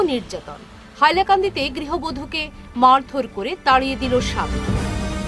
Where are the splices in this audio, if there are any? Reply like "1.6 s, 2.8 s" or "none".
none